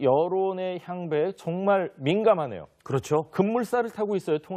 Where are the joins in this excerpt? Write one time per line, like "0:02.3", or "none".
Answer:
none